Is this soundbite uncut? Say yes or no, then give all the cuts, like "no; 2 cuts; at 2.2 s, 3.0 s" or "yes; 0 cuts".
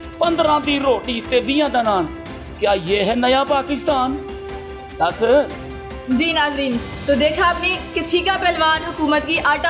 yes; 0 cuts